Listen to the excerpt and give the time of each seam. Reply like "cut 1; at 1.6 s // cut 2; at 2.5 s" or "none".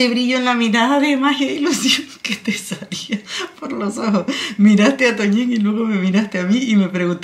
none